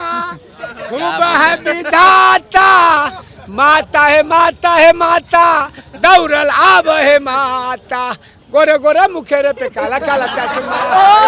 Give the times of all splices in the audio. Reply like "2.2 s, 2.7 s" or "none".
none